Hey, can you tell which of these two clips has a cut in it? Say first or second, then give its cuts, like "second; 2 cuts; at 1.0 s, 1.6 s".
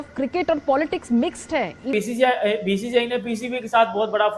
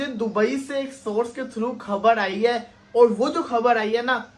first; 1 cut; at 1.9 s